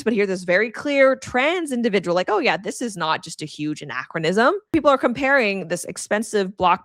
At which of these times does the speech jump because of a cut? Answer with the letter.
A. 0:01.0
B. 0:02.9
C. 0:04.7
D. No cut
C